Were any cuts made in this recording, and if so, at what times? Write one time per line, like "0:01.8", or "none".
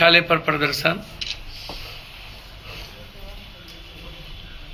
none